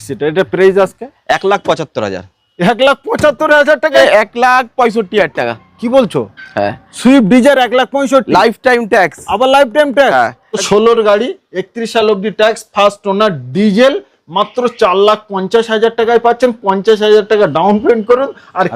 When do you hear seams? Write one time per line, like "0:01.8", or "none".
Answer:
0:04.0
0:10.6